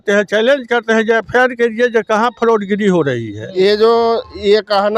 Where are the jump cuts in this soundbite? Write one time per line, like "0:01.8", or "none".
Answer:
0:03.4